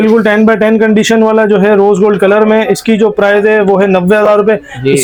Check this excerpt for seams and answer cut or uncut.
uncut